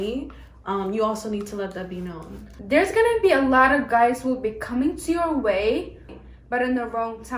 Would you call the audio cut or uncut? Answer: cut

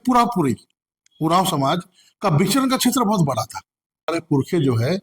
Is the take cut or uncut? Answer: cut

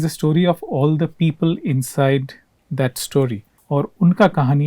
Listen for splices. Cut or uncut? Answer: uncut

